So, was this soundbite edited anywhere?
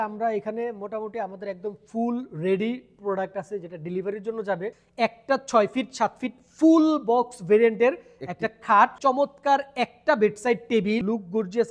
yes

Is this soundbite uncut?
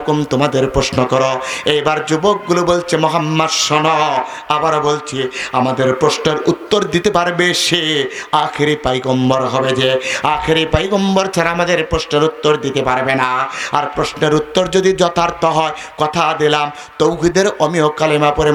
yes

